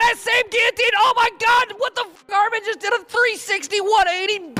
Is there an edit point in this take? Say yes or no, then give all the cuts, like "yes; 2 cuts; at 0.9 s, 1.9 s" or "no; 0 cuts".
no; 0 cuts